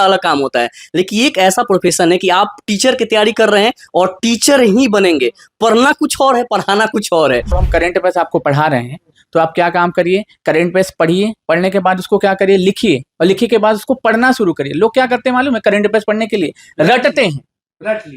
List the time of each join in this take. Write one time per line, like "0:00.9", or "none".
0:07.6